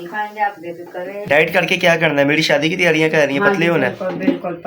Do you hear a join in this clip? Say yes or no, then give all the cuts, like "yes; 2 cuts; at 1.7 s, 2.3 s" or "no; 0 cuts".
yes; 1 cut; at 1.2 s